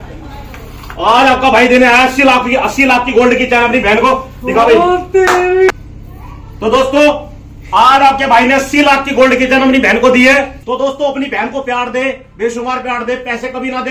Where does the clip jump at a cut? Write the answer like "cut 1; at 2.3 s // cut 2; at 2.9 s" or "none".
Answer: cut 1; at 10.6 s